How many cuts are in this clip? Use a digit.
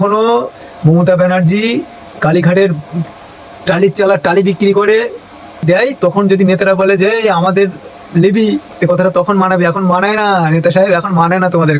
2